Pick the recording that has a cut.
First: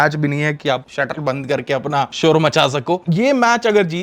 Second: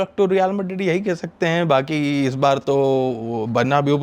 first; 3 cuts; at 0.9 s, 2.1 s, 3.0 s

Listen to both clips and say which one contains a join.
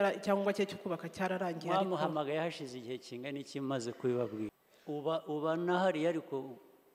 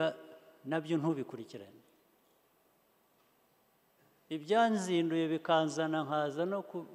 first; 1 cut; at 4.7 s

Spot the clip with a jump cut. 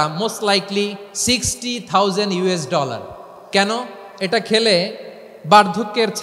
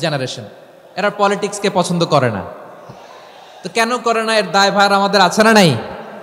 first; 2 cuts; at 1.1 s, 3.3 s

